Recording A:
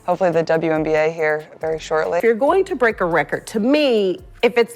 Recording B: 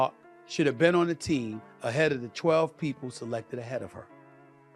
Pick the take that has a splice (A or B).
A